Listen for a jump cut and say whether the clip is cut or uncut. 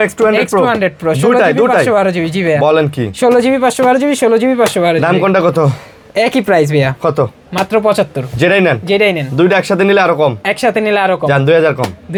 uncut